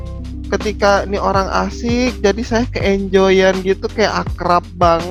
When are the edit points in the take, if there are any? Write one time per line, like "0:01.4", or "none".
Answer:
none